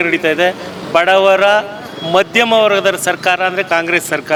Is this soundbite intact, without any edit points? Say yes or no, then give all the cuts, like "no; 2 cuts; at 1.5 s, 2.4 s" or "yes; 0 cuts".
yes; 0 cuts